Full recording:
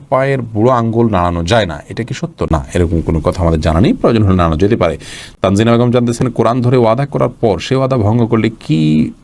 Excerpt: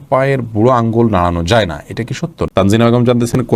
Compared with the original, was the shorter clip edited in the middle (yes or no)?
yes